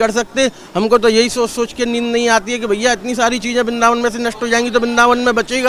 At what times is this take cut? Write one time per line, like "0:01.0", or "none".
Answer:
none